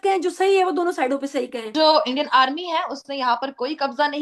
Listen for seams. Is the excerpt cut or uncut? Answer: cut